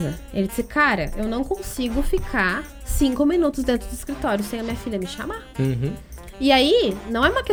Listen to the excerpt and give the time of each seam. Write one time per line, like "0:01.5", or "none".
none